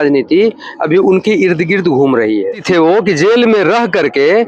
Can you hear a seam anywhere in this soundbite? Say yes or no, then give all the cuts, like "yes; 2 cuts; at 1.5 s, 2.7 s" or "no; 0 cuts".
yes; 1 cut; at 2.6 s